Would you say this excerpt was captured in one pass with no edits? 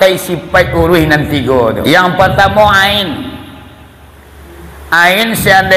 no; 1 cut; at 1.8 s

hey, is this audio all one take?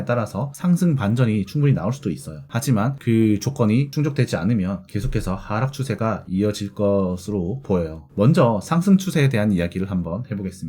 yes; 0 cuts

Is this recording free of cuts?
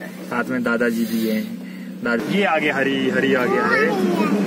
no; 1 cut; at 2.2 s

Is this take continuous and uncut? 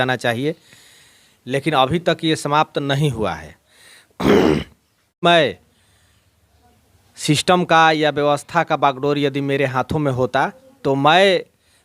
no; 1 cut; at 5.2 s

